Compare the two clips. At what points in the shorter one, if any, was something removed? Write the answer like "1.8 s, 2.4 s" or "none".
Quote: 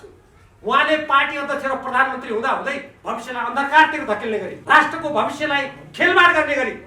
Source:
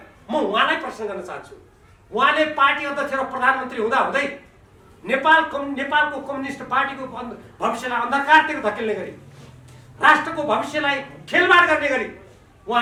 2.9 s, 4.5 s